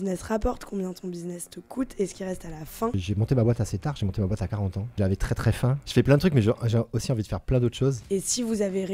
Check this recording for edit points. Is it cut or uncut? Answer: cut